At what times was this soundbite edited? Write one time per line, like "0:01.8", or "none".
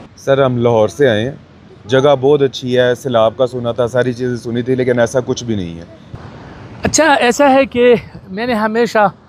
0:06.1